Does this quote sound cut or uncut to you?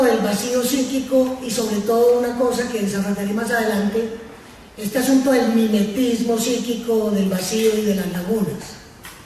cut